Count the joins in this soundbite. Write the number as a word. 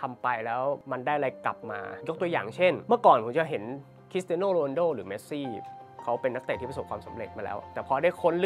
four